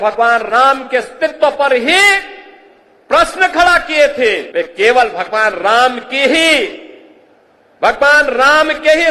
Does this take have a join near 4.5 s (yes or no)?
yes